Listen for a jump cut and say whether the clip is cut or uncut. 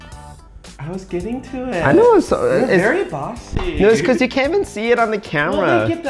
uncut